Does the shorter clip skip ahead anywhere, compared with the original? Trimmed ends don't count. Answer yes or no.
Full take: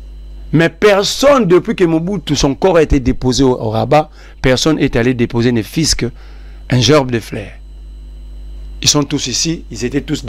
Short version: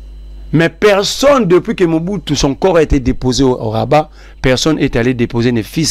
no